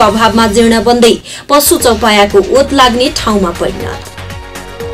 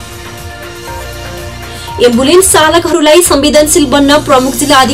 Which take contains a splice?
first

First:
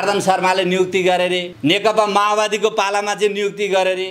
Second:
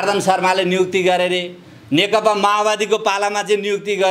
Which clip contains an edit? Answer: first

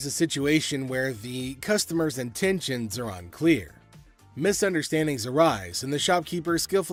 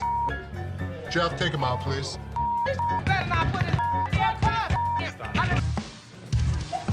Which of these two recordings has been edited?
second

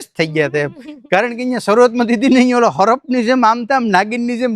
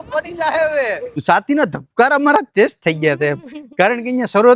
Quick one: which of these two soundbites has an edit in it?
second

